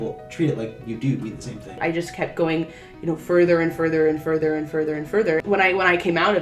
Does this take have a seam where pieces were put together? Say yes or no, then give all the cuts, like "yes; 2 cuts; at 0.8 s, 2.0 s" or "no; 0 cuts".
yes; 2 cuts; at 1.8 s, 5.4 s